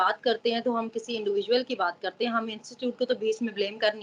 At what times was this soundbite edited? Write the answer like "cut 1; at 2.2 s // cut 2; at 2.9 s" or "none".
none